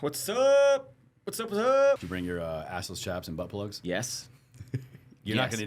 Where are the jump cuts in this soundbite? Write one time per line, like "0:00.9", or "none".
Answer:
0:02.0
0:03.8